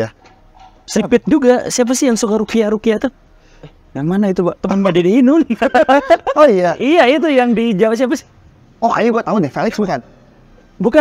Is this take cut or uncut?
uncut